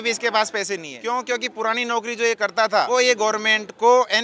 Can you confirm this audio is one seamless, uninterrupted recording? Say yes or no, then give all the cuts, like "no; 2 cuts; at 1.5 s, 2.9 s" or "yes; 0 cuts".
no; 2 cuts; at 0.9 s, 2.9 s